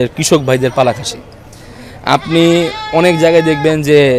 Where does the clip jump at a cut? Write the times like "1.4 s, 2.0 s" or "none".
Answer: none